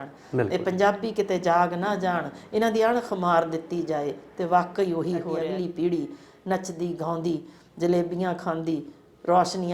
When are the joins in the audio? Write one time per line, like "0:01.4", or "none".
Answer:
0:05.4